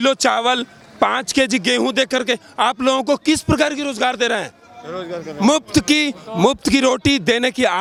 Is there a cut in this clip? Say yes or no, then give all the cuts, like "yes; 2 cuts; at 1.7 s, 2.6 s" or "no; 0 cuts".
no; 0 cuts